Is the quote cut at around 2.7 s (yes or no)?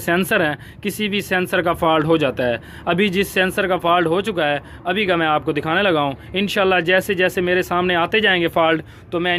no